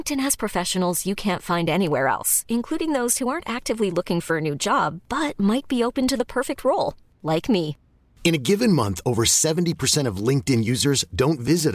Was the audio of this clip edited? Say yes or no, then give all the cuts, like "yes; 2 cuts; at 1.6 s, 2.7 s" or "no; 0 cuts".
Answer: no; 0 cuts